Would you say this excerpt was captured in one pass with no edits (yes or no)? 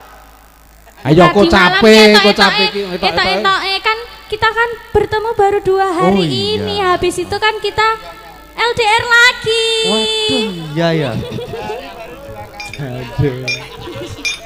yes